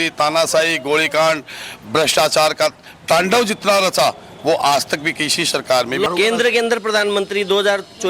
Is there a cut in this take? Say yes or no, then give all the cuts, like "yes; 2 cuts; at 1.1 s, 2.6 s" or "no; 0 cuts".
yes; 1 cut; at 6.1 s